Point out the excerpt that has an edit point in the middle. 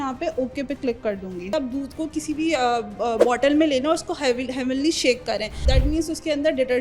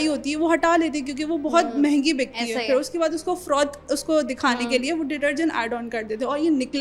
first; 2 cuts; at 1.5 s, 5.6 s

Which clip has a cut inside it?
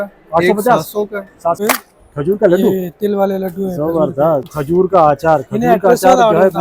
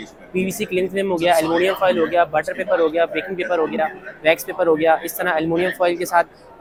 first; 2 cuts; at 1.6 s, 4.5 s

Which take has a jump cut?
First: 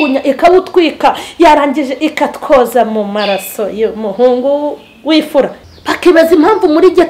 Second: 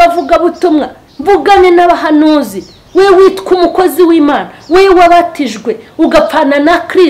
first; 1 cut; at 5.6 s

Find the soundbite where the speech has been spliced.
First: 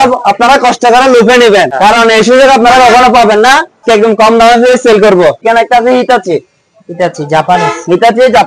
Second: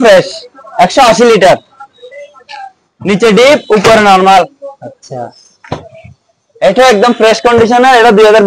first; 3 cuts; at 1.7 s, 3.8 s, 5.4 s

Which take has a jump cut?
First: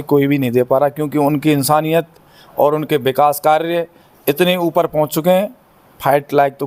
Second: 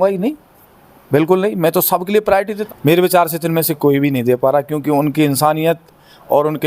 second; 1 cut; at 2.6 s

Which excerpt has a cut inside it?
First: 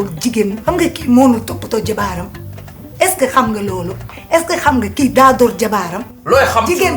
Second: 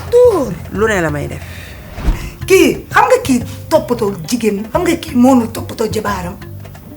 second; 1 cut; at 2.3 s

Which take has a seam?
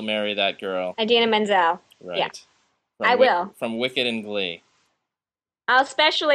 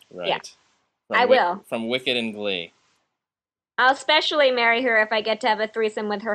first; 1 cut; at 0.9 s

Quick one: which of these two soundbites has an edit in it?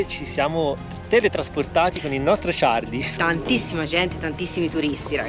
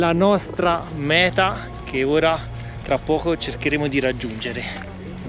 first; 1 cut; at 3.1 s

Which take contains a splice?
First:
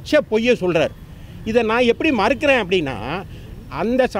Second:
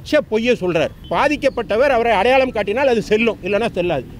second; 1 cut; at 1.1 s

